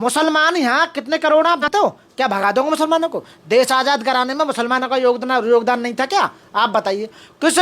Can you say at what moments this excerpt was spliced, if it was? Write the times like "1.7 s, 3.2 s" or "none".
1.6 s